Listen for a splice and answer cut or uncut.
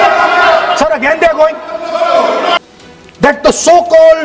cut